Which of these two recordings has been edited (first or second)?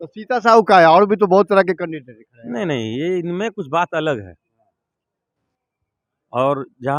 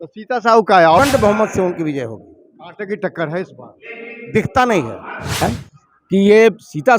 second